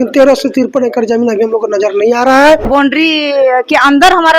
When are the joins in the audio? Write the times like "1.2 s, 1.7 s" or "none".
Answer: 2.6 s

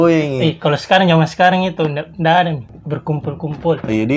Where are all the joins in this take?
2.7 s

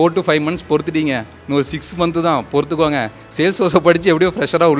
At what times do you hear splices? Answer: none

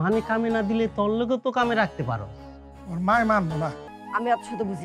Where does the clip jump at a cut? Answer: 3.9 s

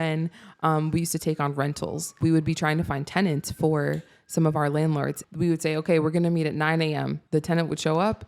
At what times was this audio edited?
2.2 s, 5.2 s, 7.2 s

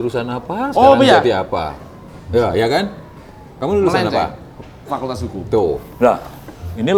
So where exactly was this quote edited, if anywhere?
none

